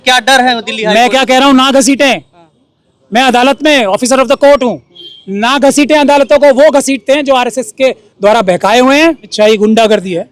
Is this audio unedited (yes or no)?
no